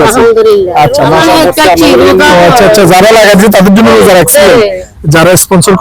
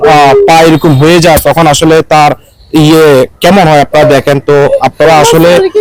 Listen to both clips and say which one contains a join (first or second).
first